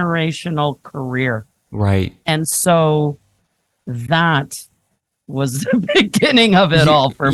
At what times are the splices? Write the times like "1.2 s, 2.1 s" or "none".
none